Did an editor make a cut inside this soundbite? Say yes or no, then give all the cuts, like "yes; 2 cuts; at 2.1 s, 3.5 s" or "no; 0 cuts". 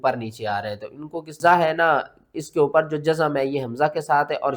yes; 1 cut; at 1.4 s